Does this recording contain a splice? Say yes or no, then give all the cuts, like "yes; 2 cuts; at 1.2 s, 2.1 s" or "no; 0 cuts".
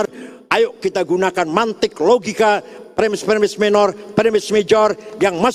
no; 0 cuts